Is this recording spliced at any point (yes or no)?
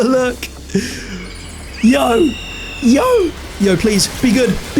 yes